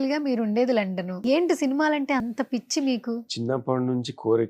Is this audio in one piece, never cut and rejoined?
no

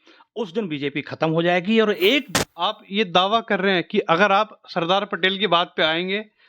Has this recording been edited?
yes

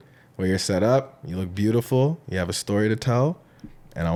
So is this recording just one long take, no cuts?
yes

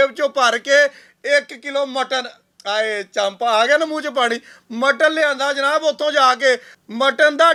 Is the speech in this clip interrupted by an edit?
no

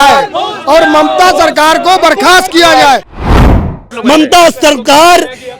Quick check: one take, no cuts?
no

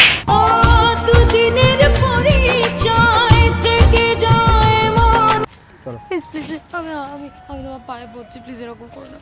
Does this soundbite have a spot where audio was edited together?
yes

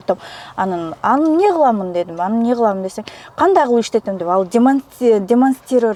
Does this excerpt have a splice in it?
no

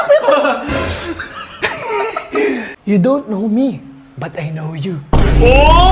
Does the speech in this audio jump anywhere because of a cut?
yes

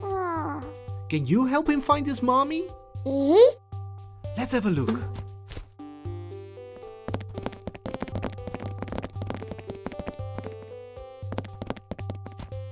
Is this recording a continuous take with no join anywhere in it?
yes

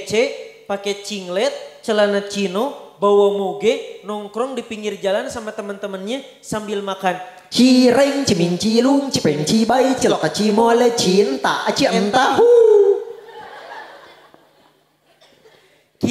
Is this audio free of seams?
yes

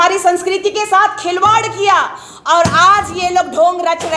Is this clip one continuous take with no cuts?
yes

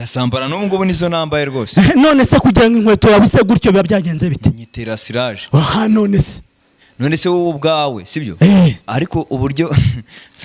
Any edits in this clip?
no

